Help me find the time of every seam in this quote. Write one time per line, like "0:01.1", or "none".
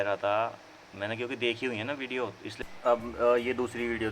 0:02.4